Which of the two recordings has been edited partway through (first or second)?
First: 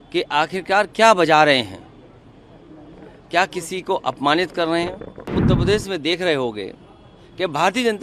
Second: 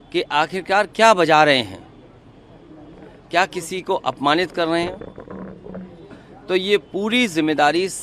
first